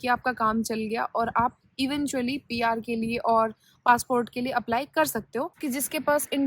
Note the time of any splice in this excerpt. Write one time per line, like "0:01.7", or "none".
0:05.6